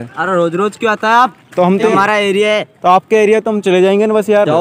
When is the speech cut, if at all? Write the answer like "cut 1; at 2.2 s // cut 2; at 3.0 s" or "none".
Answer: cut 1; at 1.9 s

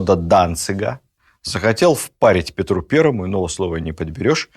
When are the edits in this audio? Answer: cut 1; at 1.1 s

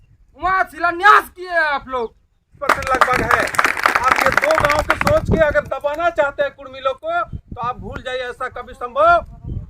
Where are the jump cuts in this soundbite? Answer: cut 1; at 2.5 s

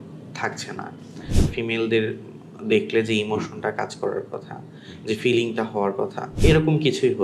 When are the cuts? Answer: cut 1; at 1.5 s // cut 2; at 6.2 s

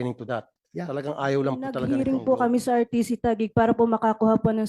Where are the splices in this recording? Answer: cut 1; at 1.8 s

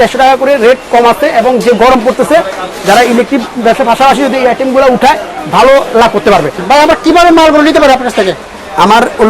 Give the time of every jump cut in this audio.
none

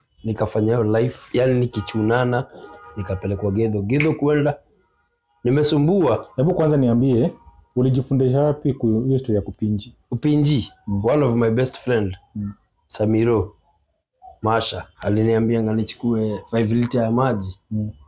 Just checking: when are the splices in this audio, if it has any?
cut 1; at 14.9 s

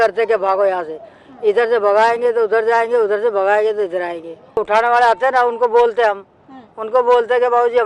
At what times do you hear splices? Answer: cut 1; at 4.6 s

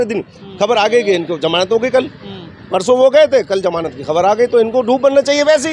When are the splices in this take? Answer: none

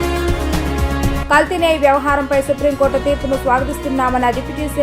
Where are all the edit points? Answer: cut 1; at 1.0 s

